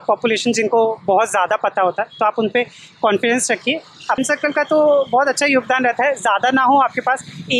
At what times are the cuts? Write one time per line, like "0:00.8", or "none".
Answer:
0:04.2